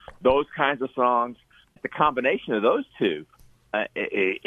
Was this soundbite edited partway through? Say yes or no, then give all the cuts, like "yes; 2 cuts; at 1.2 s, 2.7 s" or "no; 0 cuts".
yes; 1 cut; at 1.8 s